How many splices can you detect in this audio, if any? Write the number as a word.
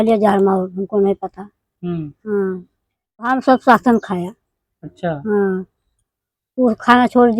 one